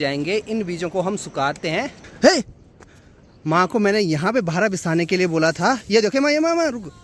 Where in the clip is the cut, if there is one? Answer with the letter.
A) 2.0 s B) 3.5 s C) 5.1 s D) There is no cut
A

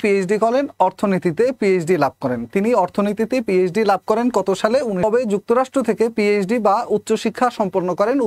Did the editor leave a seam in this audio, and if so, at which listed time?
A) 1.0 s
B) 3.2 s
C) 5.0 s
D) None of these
C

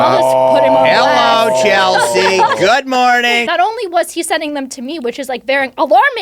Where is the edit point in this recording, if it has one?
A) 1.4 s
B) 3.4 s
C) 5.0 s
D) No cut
B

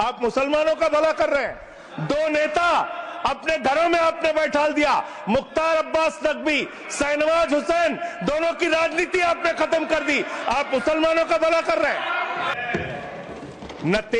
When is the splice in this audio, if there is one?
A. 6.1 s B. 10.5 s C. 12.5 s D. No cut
C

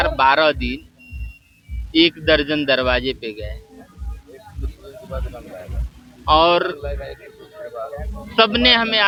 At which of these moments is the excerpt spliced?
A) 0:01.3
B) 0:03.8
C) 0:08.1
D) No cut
D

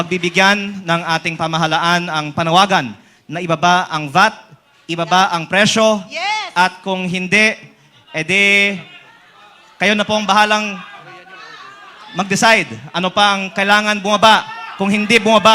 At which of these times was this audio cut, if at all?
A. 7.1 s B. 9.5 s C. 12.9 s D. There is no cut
D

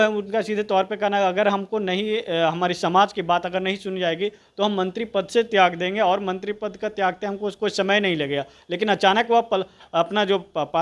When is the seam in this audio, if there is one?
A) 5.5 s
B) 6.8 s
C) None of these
C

